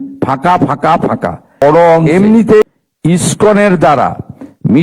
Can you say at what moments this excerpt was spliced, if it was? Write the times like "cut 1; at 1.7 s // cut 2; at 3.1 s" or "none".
cut 1; at 2.6 s